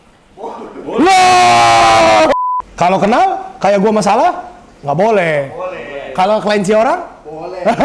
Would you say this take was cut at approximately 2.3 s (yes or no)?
yes